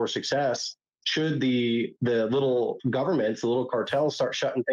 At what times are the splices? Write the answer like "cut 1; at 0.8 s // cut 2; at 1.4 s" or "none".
cut 1; at 1.9 s // cut 2; at 2.8 s